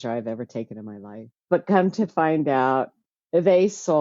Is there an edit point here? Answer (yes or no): yes